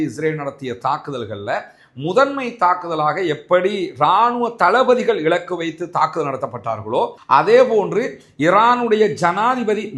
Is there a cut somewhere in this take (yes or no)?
no